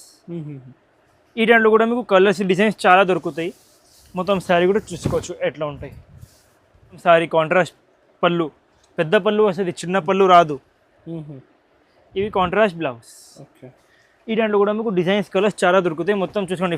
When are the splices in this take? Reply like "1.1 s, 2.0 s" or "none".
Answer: 7.0 s